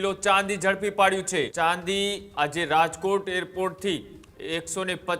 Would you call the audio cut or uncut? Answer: cut